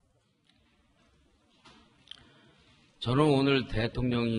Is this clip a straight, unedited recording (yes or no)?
yes